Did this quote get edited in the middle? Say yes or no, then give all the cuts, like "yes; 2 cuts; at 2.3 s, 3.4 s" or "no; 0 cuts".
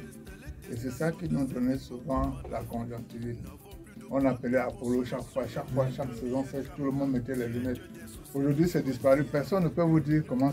no; 0 cuts